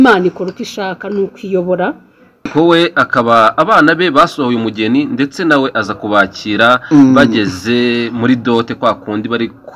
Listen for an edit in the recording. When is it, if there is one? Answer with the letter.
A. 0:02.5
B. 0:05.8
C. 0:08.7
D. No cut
A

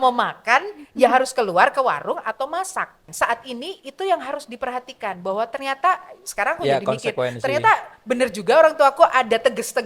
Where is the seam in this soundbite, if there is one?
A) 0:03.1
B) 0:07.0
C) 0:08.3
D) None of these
A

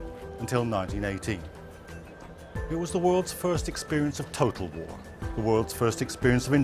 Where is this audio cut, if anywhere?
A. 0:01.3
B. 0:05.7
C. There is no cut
B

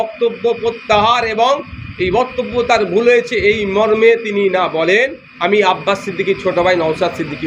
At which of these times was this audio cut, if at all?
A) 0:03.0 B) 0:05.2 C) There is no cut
B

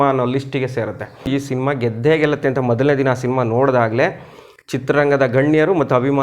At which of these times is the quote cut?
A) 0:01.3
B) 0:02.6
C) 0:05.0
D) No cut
A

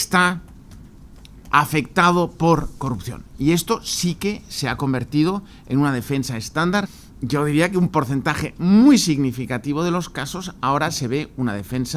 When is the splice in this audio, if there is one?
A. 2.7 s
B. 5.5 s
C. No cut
A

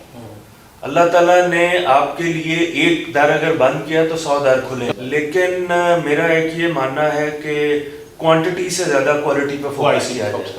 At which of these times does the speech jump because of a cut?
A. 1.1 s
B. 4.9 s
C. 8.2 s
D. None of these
B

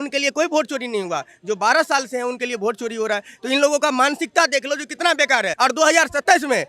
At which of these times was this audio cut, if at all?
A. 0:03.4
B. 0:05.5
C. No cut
B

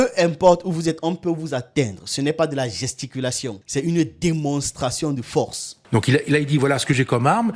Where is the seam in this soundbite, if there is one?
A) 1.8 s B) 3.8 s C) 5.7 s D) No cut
C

